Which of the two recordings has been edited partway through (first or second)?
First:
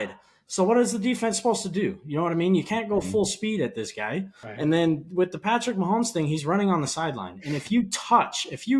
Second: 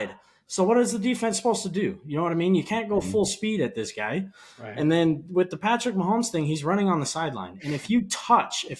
first